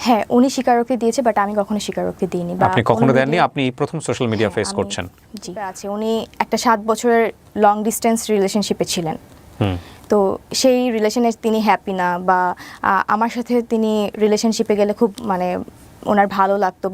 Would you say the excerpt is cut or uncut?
cut